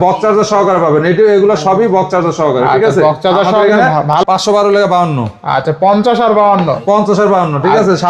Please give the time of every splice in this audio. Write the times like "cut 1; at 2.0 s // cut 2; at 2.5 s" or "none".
cut 1; at 4.1 s